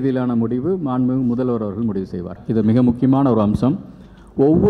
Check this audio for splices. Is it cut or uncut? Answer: cut